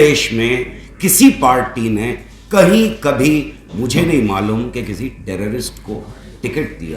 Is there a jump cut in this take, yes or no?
no